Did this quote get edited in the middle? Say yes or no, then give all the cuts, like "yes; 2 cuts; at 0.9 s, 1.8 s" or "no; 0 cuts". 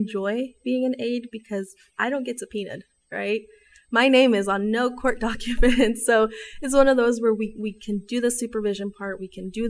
no; 0 cuts